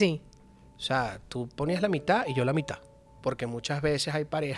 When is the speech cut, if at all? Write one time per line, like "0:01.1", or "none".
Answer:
0:03.1